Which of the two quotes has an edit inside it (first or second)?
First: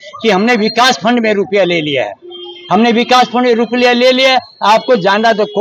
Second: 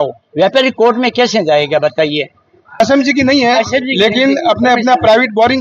second